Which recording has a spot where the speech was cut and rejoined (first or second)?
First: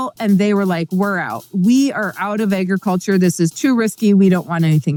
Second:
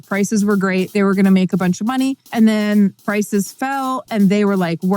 second